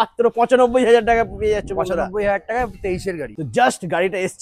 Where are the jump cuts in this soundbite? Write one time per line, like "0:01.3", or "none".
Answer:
0:03.3